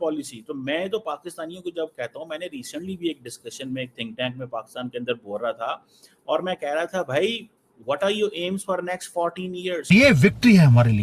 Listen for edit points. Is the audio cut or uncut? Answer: cut